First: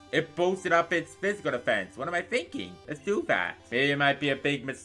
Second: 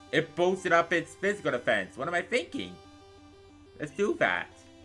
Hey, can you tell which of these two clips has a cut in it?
first; 2 cuts; at 2.8 s, 3.6 s

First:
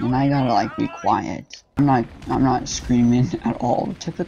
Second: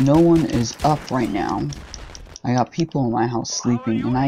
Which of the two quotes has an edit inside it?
first; 1 cut; at 1.8 s

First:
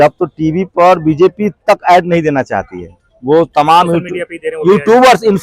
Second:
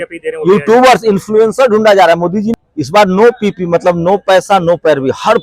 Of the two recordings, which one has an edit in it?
second; 1 cut; at 2.5 s

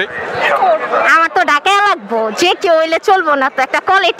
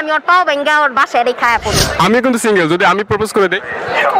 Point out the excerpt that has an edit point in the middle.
second; 1 cut; at 1.9 s

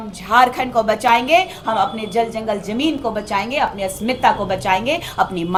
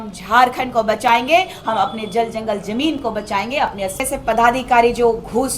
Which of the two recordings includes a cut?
second; 1 cut; at 4.0 s

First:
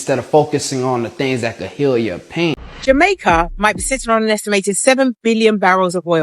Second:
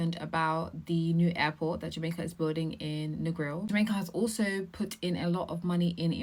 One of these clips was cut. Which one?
first; 1 cut; at 2.7 s

